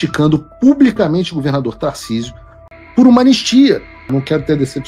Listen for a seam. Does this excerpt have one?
yes; 2 cuts; at 2.5 s, 4.1 s

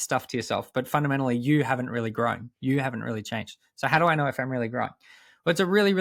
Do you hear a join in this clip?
no; 0 cuts

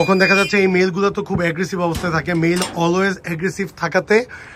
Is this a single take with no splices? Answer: yes; 0 cuts

